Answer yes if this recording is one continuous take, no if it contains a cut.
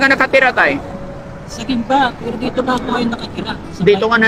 yes